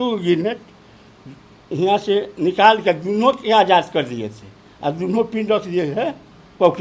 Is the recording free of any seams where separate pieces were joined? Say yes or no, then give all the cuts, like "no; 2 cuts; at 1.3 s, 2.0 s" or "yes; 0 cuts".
yes; 0 cuts